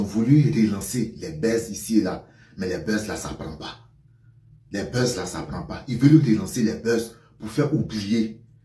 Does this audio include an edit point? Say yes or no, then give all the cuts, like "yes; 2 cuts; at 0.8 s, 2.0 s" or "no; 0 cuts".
no; 0 cuts